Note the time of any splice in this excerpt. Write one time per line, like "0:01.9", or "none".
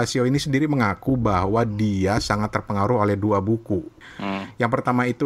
0:04.0